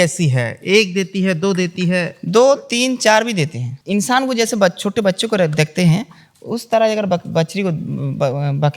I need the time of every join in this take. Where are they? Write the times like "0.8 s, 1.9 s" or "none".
3.7 s